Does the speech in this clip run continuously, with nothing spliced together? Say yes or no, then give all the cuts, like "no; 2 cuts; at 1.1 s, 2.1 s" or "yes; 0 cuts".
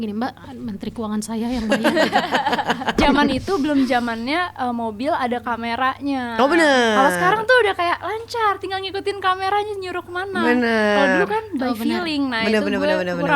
no; 1 cut; at 3.0 s